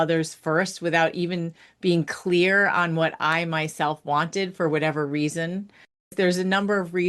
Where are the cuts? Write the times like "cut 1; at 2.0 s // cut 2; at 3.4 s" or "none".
cut 1; at 6.1 s